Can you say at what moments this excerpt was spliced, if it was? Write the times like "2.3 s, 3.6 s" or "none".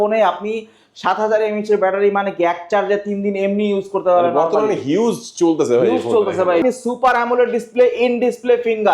6.6 s